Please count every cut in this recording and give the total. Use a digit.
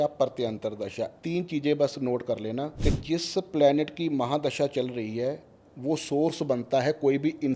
2